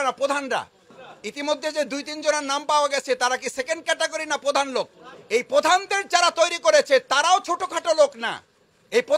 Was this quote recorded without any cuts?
yes; 0 cuts

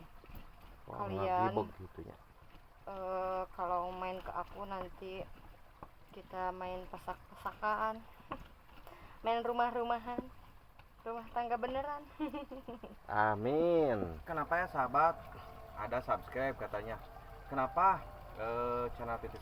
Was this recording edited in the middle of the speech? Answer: yes; 1 cut; at 14.3 s

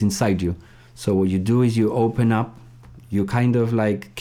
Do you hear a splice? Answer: no; 0 cuts

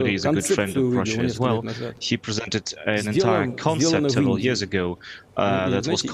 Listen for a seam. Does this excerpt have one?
no; 0 cuts

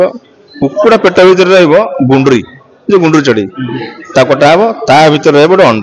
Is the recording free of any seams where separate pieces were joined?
yes; 0 cuts

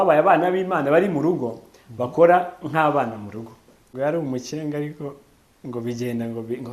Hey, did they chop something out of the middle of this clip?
yes; 1 cut; at 3.9 s

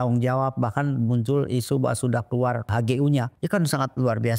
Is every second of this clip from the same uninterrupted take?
no; 2 cuts; at 2.7 s, 3.3 s

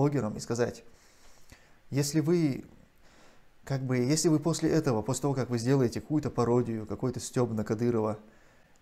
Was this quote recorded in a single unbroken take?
yes; 0 cuts

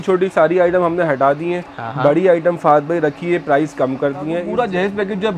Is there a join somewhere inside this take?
yes; 1 cut; at 4.5 s

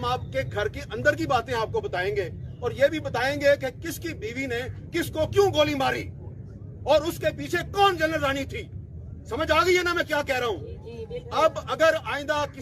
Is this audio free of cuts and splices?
yes; 0 cuts

